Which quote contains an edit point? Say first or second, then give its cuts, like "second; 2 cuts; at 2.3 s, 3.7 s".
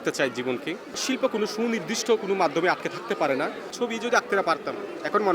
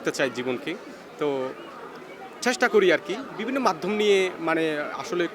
first; 2 cuts; at 1.0 s, 3.7 s